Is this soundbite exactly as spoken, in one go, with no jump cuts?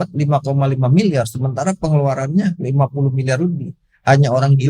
yes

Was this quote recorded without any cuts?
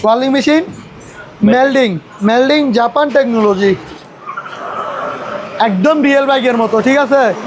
no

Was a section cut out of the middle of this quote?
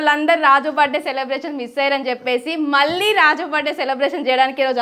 no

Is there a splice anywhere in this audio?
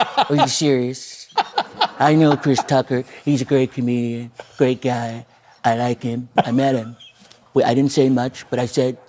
yes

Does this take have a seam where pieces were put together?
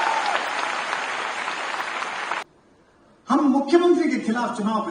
yes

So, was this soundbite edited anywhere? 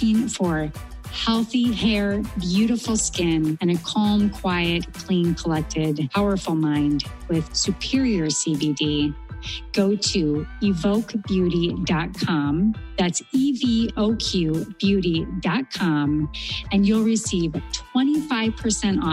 no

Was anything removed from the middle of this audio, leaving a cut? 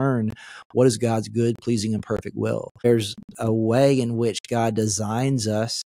yes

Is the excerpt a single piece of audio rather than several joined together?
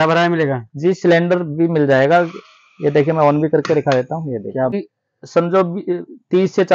no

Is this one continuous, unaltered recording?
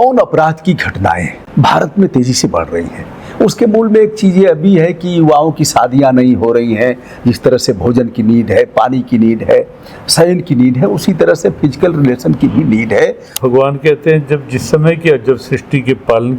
no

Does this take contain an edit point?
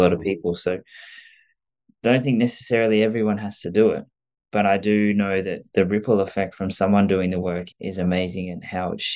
yes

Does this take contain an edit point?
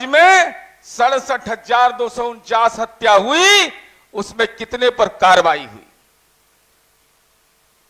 no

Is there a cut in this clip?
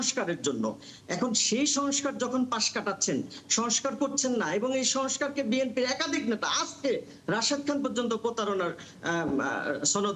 no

